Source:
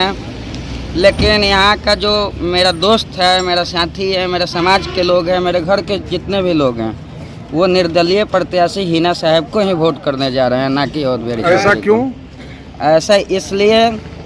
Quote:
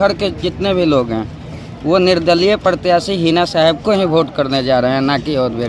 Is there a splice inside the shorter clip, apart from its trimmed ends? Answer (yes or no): no